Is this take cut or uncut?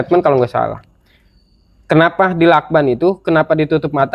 uncut